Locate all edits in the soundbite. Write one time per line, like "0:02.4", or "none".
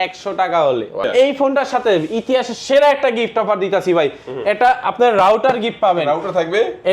0:01.0